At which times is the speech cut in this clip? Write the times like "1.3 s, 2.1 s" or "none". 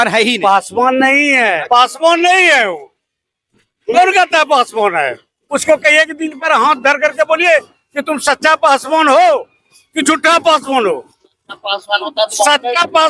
1.6 s, 5.4 s